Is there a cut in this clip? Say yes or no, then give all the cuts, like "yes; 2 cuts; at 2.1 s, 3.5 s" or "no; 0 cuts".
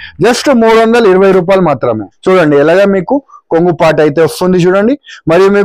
yes; 1 cut; at 2.1 s